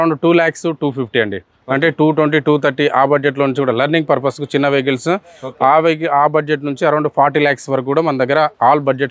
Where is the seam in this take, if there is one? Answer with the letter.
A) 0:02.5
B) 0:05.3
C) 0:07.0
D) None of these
D